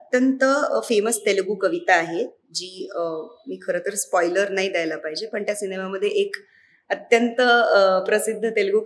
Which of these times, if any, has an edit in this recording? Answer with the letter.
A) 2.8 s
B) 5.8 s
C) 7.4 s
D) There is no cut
D